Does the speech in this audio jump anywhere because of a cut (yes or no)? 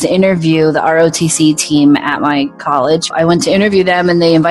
yes